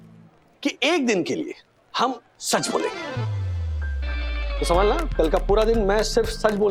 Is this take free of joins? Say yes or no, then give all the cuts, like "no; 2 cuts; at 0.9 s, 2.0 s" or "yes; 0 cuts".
yes; 0 cuts